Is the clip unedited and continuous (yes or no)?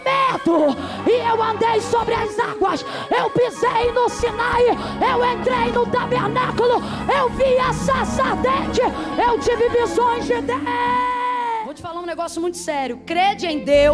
no